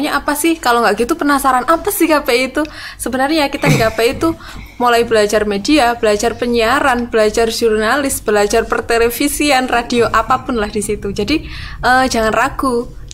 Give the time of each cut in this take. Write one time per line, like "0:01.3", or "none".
none